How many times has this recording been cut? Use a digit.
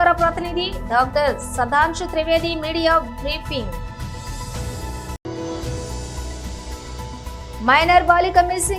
0